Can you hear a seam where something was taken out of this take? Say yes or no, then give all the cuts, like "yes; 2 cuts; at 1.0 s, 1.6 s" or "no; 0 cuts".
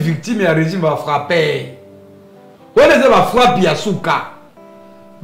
no; 0 cuts